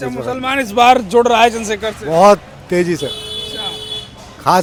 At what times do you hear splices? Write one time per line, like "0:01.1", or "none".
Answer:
none

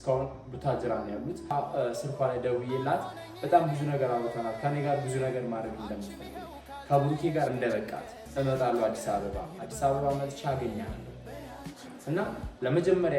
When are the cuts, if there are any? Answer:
0:01.5
0:08.2

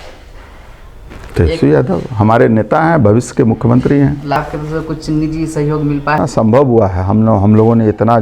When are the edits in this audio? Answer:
0:04.4
0:06.2

